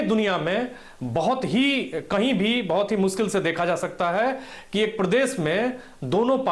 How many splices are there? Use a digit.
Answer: 0